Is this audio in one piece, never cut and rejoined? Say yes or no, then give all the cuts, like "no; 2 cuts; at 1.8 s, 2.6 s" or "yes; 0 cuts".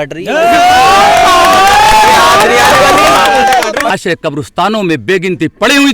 no; 1 cut; at 3.9 s